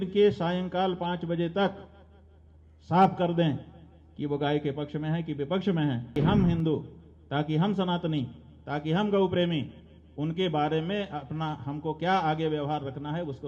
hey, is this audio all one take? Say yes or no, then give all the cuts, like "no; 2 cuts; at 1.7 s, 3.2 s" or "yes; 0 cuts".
no; 1 cut; at 6.1 s